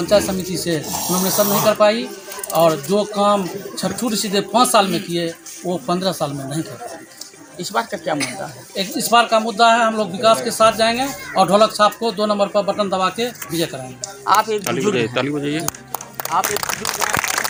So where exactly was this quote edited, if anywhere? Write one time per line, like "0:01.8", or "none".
none